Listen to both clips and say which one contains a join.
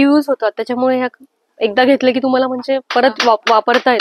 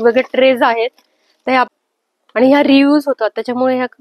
second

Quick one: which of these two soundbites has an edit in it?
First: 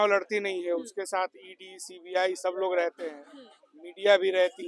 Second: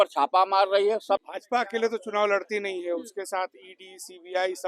second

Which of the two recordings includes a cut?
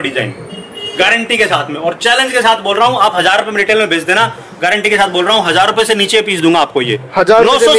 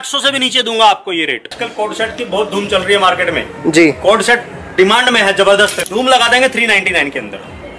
second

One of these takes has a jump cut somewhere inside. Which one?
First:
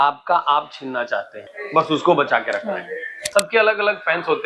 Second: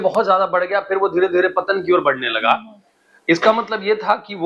first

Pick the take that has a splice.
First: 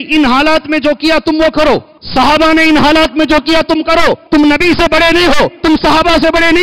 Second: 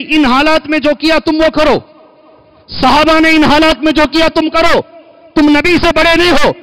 first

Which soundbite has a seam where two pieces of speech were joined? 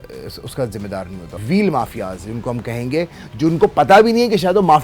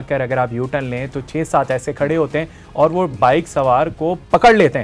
first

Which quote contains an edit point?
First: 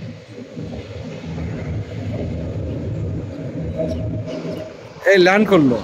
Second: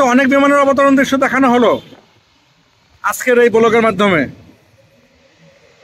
first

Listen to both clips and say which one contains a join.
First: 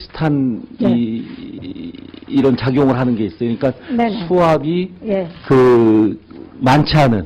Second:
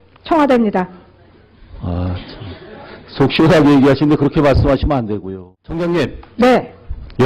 first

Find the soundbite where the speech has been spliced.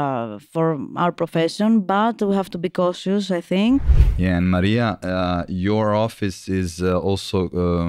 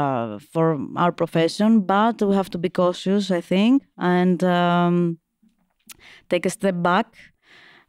first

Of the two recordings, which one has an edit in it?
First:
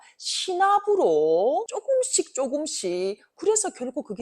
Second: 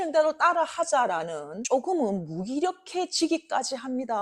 first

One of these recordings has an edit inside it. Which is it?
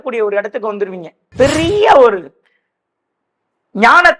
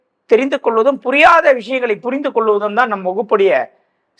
first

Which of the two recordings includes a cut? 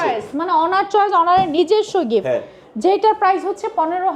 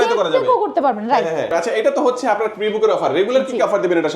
second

